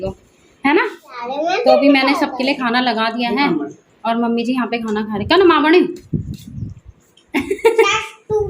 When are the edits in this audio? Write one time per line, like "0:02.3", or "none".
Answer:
0:01.2